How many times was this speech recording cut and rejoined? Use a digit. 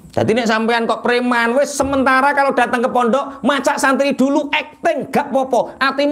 0